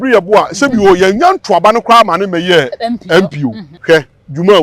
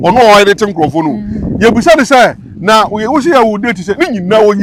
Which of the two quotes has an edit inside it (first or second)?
first